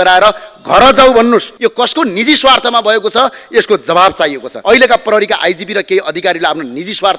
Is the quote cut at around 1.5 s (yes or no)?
yes